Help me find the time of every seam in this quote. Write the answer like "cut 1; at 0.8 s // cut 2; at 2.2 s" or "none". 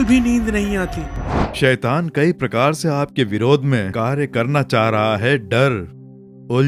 cut 1; at 1.4 s